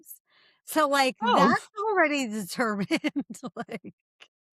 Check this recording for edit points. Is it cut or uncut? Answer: uncut